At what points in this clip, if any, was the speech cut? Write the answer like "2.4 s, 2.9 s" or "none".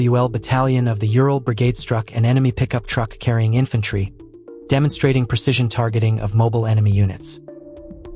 7.2 s